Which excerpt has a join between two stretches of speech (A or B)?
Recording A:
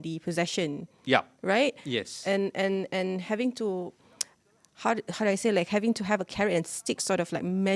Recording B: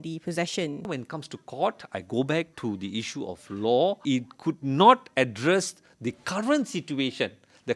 B